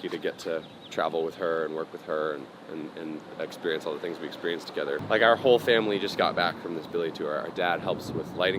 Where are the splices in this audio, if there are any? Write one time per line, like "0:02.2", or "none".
0:05.0

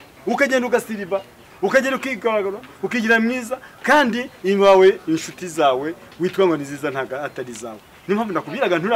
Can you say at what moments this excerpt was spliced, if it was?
none

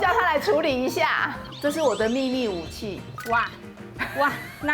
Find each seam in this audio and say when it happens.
0:01.4

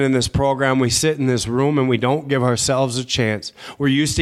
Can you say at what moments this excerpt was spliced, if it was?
none

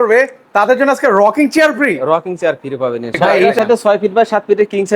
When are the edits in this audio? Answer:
0:03.5

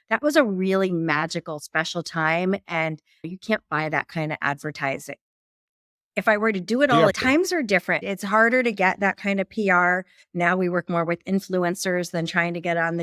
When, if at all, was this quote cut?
0:07.1

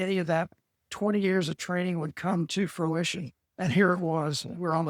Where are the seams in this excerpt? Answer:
none

